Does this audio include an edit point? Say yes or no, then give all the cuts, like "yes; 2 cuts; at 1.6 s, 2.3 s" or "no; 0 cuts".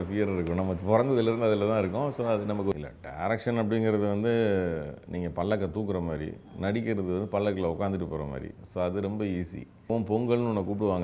yes; 2 cuts; at 2.7 s, 9.9 s